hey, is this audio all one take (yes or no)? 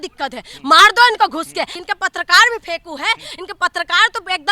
no